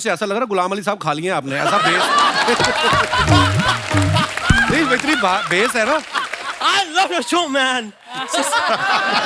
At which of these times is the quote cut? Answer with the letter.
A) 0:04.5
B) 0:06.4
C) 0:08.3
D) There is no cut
B